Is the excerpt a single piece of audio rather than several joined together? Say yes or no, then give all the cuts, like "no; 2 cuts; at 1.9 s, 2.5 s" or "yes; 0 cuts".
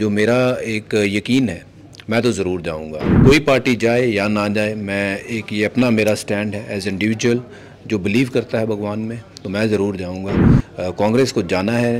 no; 1 cut; at 3.1 s